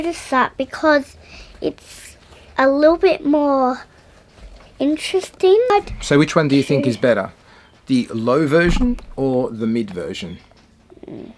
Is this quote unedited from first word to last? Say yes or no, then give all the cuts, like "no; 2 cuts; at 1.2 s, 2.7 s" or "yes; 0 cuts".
no; 1 cut; at 5.8 s